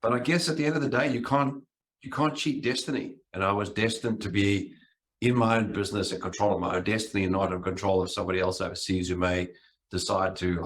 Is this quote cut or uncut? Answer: uncut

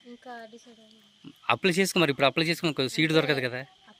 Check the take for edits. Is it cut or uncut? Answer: uncut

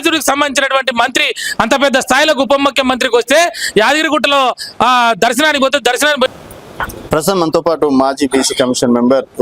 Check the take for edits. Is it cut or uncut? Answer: cut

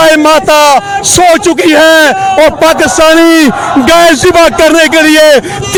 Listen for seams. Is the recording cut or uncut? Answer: uncut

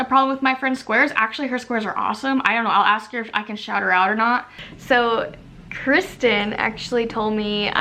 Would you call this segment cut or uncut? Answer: uncut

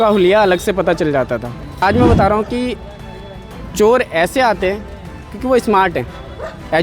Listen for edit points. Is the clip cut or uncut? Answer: cut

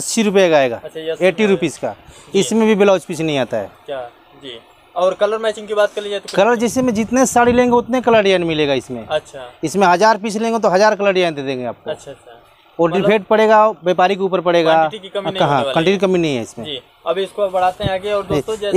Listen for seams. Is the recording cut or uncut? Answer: uncut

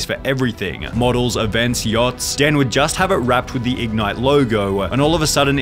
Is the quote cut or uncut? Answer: uncut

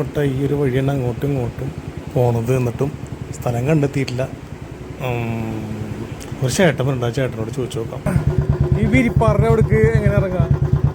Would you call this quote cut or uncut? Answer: cut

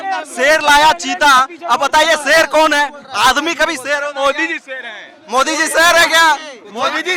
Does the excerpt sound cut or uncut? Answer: uncut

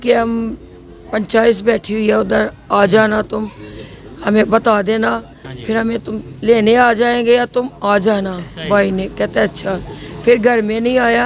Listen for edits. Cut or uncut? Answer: uncut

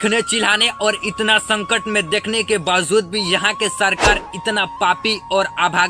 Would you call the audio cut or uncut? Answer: uncut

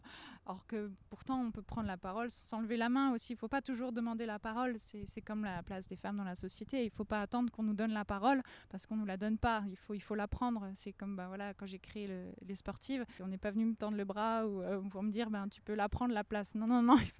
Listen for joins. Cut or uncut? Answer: cut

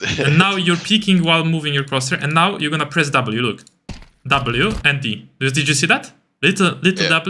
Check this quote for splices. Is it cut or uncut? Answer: uncut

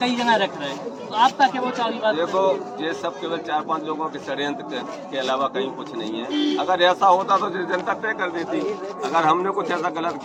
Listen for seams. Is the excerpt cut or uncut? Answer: uncut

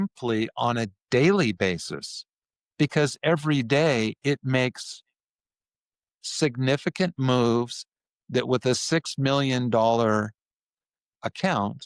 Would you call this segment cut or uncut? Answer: uncut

